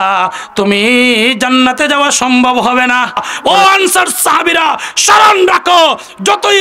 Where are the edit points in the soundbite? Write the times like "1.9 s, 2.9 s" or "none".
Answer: 3.3 s